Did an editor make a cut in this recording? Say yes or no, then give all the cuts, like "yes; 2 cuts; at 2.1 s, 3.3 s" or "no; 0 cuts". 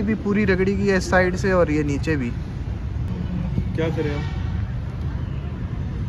no; 0 cuts